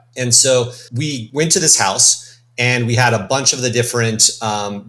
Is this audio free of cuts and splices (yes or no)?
no